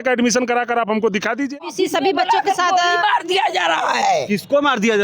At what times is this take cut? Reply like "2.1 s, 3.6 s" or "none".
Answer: 1.6 s